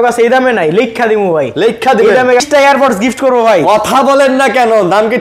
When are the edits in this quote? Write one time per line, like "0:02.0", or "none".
0:02.4